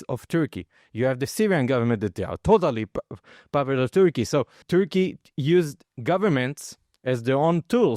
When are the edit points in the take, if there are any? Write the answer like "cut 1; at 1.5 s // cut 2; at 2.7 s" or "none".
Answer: cut 1; at 4.6 s // cut 2; at 5.9 s